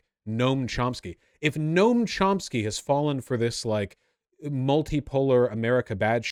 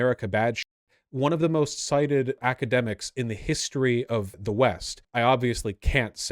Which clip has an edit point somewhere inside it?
second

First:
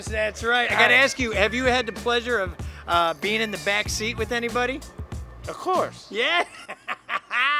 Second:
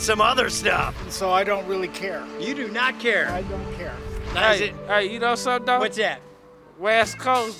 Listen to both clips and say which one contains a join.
second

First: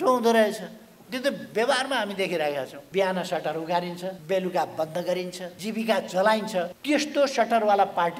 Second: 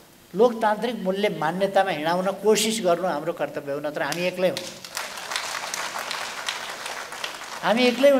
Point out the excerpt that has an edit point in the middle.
first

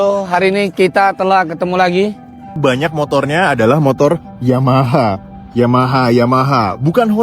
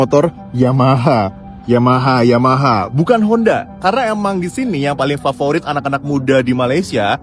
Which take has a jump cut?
first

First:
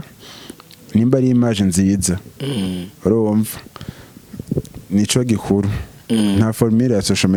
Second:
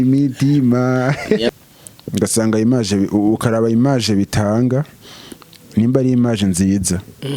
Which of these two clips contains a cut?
second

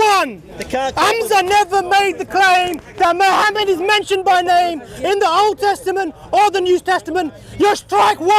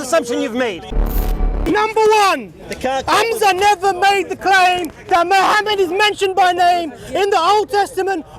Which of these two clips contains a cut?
second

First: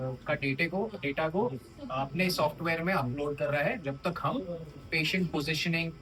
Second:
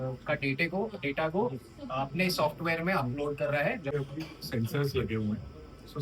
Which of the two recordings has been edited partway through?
second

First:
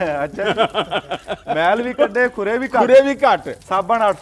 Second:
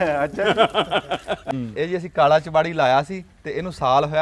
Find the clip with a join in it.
second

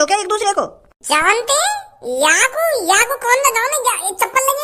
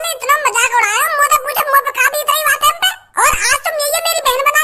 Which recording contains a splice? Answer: second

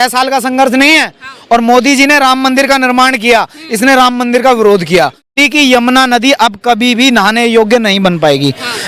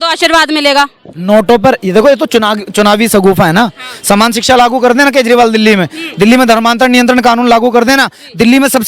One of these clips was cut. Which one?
first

